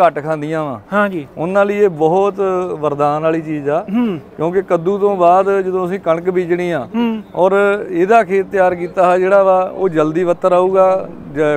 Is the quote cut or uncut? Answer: uncut